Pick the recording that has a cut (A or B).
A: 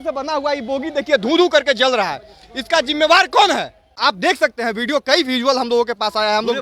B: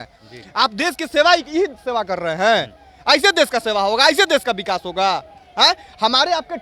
A